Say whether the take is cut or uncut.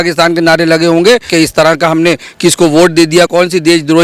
cut